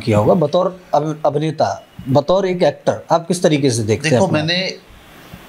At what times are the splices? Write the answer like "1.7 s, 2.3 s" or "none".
none

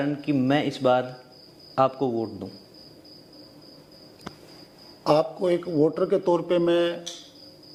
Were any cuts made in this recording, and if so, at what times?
none

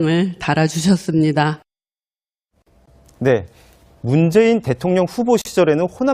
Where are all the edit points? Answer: 5.1 s

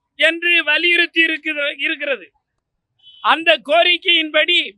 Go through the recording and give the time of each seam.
none

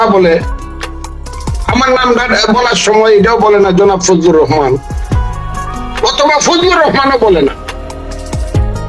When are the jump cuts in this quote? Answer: none

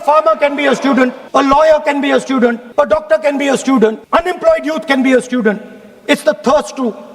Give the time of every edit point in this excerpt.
1.2 s, 2.6 s, 4.0 s

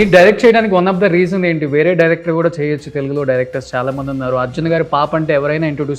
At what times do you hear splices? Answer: none

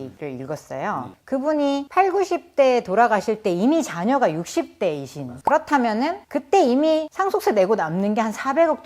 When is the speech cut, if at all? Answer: 1.1 s

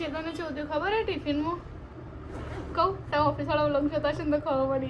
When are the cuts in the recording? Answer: none

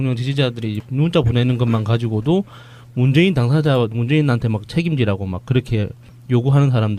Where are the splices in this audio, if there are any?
none

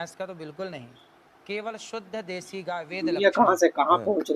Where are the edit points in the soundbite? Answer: 3.0 s

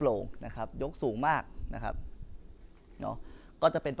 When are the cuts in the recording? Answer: none

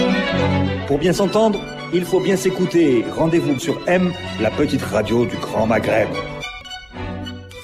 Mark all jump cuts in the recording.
6.5 s

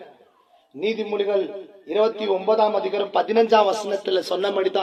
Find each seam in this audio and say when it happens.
none

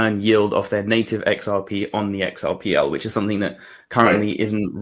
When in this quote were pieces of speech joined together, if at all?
none

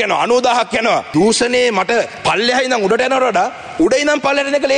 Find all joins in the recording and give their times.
1.1 s, 2.1 s

